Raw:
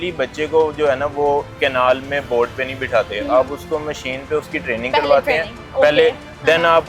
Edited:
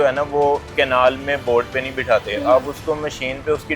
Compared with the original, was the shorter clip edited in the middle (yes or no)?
no